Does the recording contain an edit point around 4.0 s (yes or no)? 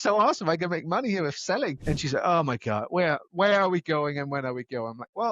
no